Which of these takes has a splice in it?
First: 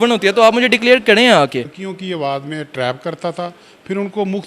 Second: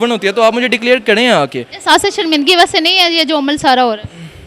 first; 1 cut; at 1.7 s

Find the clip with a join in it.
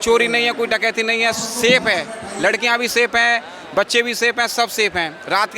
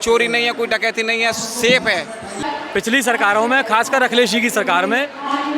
second; 1 cut; at 2.4 s

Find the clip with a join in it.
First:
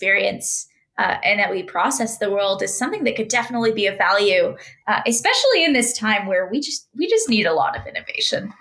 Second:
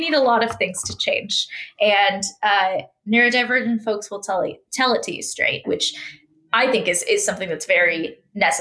second; 1 cut; at 5.6 s

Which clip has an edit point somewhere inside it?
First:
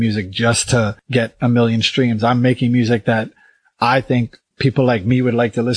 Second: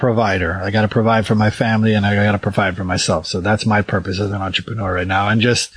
first; 2 cuts; at 1.0 s, 4.4 s

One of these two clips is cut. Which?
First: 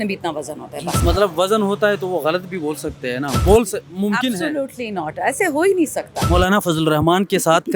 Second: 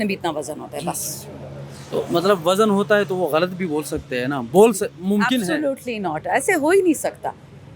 first; 2 cuts; at 1.0 s, 6.2 s

